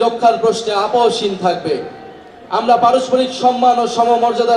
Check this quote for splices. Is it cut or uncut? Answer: uncut